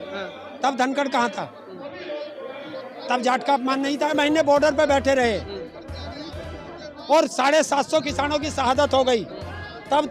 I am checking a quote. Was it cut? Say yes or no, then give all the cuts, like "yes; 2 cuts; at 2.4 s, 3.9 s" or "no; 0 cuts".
yes; 1 cut; at 4.1 s